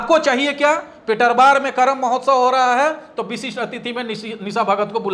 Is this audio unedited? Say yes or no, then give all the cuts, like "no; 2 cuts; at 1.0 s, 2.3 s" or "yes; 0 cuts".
yes; 0 cuts